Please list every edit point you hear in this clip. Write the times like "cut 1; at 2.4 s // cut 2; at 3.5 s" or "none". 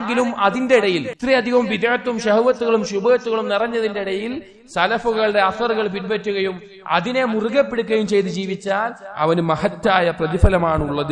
cut 1; at 1.1 s